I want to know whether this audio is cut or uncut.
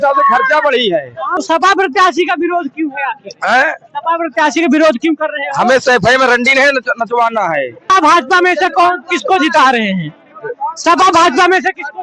cut